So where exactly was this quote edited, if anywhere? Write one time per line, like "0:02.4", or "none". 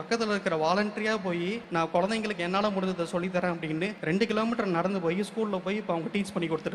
0:01.6
0:04.0